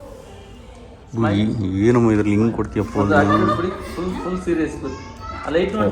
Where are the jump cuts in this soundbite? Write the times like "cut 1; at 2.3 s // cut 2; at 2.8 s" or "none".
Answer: cut 1; at 0.9 s